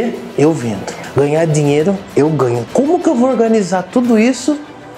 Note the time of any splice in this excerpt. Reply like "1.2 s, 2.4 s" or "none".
1.0 s, 2.6 s